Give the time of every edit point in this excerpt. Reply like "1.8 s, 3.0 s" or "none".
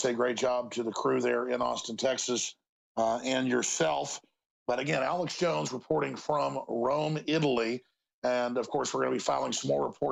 none